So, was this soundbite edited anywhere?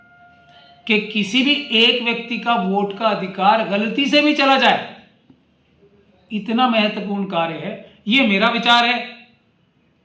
no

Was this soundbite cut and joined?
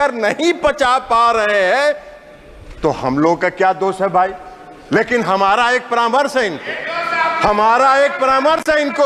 no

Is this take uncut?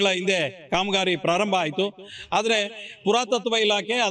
yes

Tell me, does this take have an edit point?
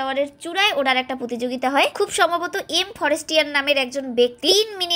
no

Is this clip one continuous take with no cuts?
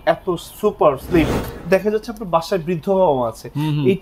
no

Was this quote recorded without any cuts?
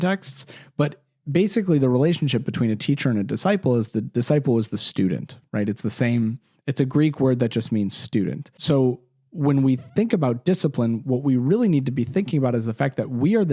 no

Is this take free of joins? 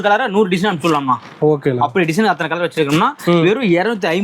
yes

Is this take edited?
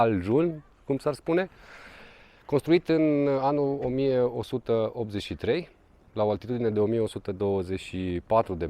no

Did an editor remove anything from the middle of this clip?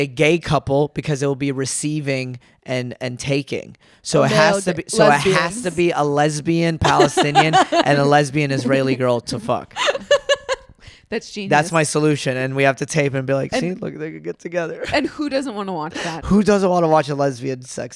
no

